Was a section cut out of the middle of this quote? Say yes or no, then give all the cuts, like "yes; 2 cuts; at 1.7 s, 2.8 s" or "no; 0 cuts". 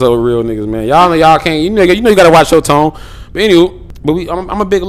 yes; 1 cut; at 3.9 s